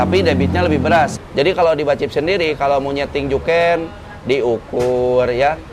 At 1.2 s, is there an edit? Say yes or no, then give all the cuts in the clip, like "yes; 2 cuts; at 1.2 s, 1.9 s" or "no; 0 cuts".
yes; 1 cut; at 1.2 s